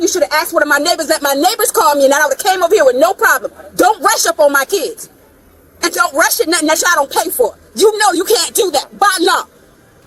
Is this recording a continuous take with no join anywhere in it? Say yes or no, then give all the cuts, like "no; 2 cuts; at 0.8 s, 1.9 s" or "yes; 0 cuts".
yes; 0 cuts